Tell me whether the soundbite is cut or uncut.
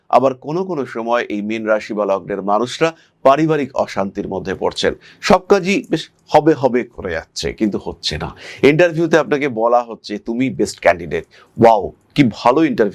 uncut